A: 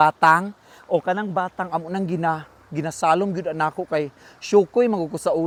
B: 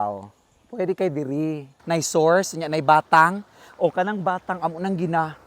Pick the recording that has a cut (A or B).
B